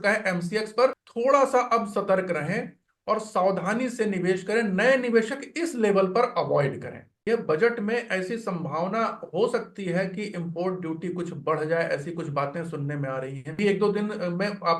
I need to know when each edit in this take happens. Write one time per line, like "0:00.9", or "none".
0:01.0
0:07.2
0:13.6